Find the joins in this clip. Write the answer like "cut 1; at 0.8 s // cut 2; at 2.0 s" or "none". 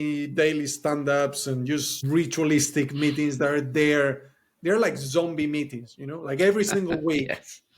cut 1; at 1.9 s